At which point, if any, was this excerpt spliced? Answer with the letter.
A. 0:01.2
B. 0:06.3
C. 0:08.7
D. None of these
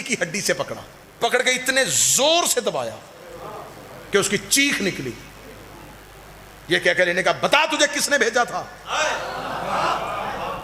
A